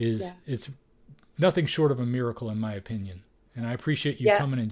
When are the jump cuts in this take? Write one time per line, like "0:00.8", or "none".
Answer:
none